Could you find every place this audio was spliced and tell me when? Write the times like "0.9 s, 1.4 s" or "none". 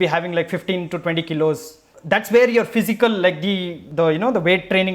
1.9 s, 3.8 s